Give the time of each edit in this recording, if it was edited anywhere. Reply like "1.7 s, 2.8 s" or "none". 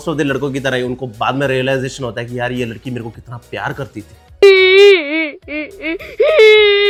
none